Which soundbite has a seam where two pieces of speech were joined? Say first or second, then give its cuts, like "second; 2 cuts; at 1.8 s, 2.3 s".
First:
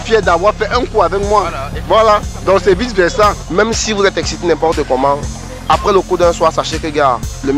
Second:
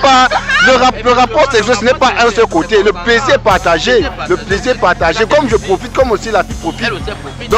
first; 2 cuts; at 1.7 s, 3.4 s